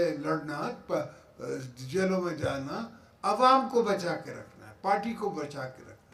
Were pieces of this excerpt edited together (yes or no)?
no